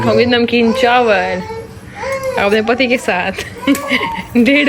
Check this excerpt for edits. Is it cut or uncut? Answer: uncut